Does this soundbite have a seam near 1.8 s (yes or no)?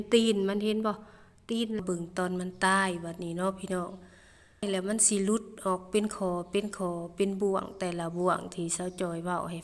yes